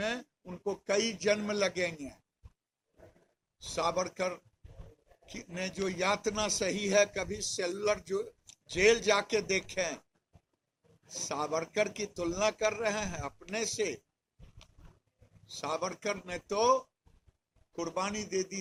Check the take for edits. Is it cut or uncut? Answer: uncut